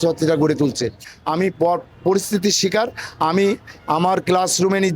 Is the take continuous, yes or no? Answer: no